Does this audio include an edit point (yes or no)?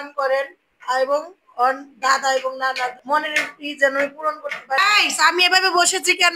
yes